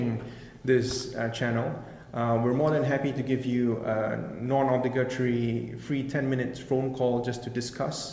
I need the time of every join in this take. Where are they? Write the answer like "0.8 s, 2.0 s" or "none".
none